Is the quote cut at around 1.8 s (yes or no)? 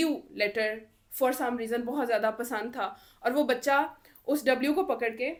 no